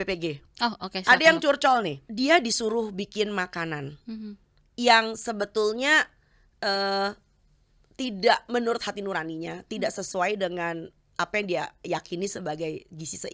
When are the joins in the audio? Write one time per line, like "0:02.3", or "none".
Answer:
0:02.0